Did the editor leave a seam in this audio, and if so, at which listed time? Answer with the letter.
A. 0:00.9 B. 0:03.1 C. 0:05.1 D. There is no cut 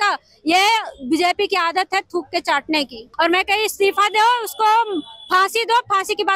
B